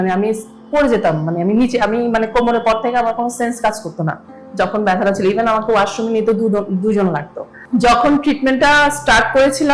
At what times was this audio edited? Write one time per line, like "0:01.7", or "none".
0:07.7